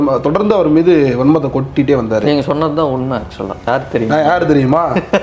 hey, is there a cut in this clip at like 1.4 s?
no; 1 cut; at 3.6 s

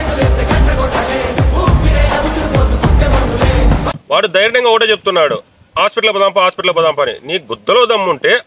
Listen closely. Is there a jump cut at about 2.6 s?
no; 1 cut; at 3.9 s

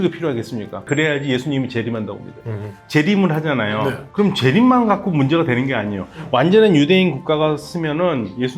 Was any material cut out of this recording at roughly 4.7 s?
no; 2 cuts; at 0.8 s, 2.8 s

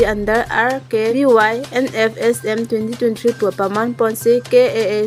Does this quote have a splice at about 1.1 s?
yes; 1 cut; at 1.1 s

